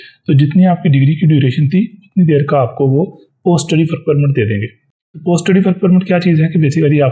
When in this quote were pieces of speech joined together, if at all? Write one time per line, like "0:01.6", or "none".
none